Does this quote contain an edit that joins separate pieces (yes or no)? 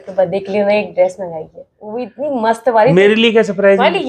yes